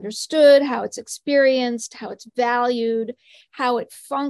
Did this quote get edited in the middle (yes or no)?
no